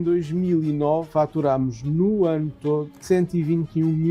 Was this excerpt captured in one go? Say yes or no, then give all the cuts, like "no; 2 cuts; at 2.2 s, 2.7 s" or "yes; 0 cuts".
no; 1 cut; at 1.1 s